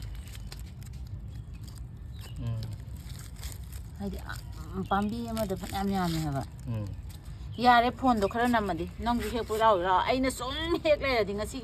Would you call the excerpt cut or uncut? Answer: uncut